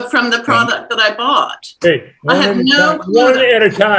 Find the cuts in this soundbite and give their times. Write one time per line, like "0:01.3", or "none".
none